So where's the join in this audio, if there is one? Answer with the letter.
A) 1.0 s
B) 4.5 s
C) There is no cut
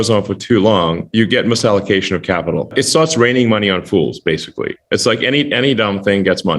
A